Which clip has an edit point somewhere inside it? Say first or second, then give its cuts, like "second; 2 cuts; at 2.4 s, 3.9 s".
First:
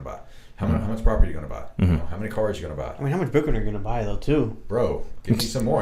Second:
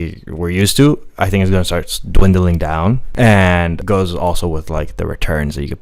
second; 2 cuts; at 3.1 s, 3.8 s